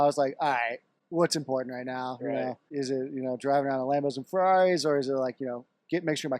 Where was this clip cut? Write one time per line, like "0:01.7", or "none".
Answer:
0:00.9
0:02.6